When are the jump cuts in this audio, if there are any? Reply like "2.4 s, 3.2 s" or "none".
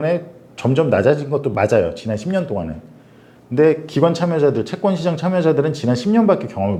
none